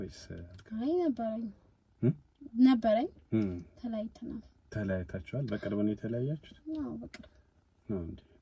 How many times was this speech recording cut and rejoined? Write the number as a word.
zero